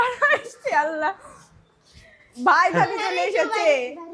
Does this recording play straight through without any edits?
yes; 0 cuts

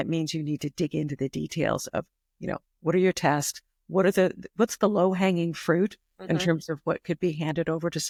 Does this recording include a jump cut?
no; 0 cuts

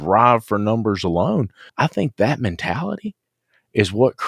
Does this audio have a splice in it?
yes; 1 cut; at 1.6 s

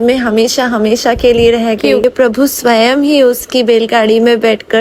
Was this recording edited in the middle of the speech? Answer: yes; 1 cut; at 2.0 s

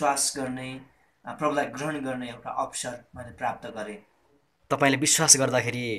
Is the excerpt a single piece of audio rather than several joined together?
yes; 0 cuts

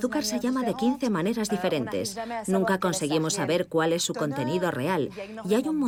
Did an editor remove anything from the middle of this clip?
no; 0 cuts

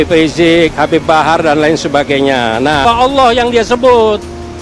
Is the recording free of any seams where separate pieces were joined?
no; 1 cut; at 2.8 s

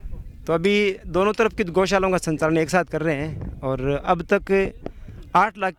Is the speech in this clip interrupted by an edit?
no; 0 cuts

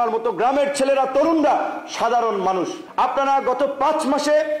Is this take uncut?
no; 1 cut; at 2.8 s

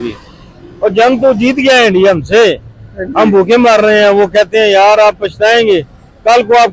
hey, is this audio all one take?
yes; 0 cuts

